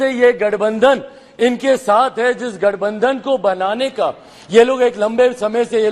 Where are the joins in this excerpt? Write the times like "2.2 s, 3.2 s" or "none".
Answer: none